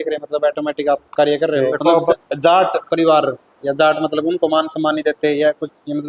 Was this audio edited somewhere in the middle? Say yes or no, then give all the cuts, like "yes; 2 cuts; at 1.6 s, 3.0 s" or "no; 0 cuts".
yes; 1 cut; at 2.1 s